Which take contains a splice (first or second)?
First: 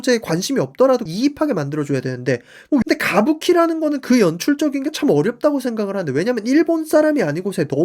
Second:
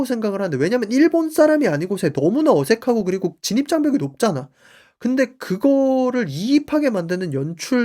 first